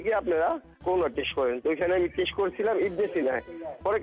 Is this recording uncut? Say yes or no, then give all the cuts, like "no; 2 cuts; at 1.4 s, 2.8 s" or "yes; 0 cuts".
yes; 0 cuts